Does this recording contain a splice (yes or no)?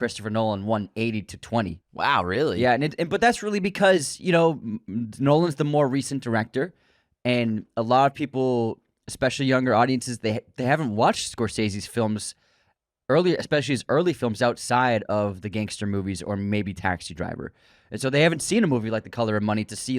yes